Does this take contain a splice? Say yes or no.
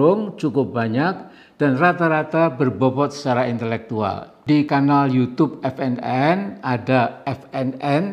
no